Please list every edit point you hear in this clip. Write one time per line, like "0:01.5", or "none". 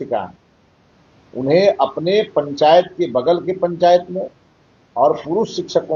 none